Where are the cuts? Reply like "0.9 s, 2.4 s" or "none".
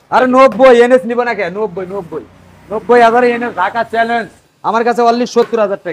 4.4 s

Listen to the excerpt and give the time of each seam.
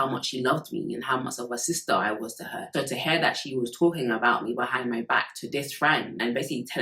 none

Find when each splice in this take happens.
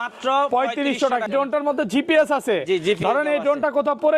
1.3 s

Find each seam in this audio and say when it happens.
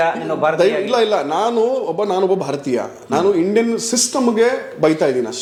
none

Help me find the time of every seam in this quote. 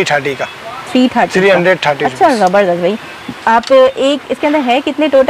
none

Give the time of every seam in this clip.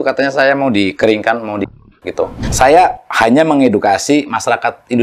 2.4 s

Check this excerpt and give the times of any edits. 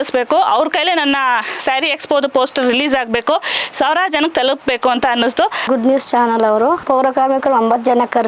5.6 s, 6.8 s

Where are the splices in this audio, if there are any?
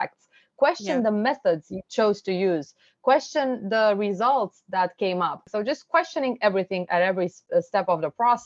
5.5 s

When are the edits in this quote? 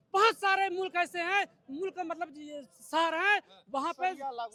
none

